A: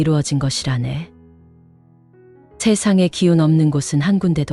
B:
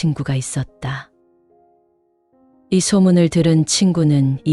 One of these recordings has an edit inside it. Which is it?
B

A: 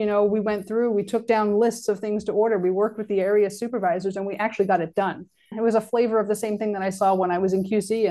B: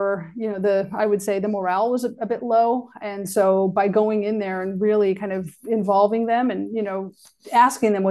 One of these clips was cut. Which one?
A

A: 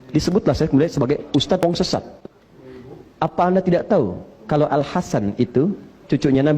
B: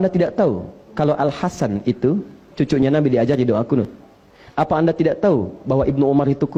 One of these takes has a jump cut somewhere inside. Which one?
A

